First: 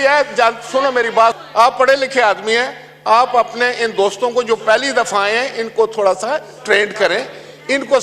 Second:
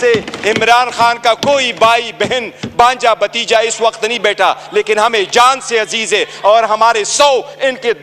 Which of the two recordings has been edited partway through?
first; 1 cut; at 1.4 s

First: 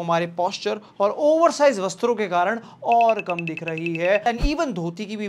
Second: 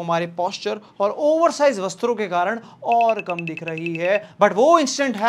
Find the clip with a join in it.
first; 1 cut; at 4.2 s

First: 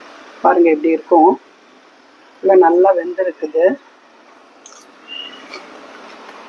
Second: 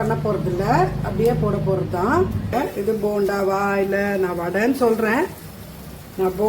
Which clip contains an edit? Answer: second; 1 cut; at 2.5 s

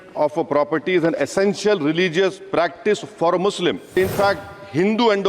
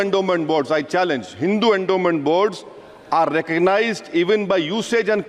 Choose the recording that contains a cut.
first; 1 cut; at 3.9 s

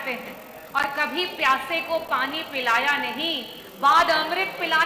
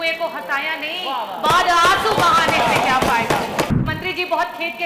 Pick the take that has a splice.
second; 1 cut; at 3.8 s

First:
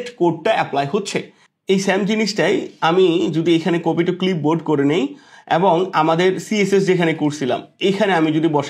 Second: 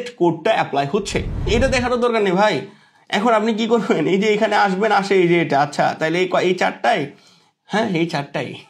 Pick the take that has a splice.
second; 1 cut; at 1.5 s

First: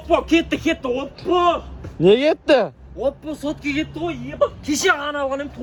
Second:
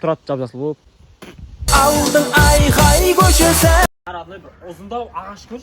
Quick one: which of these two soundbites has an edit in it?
second; 1 cut; at 4.0 s

